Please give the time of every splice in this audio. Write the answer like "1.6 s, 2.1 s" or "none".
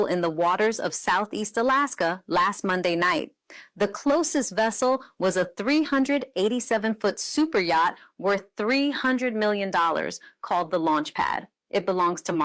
none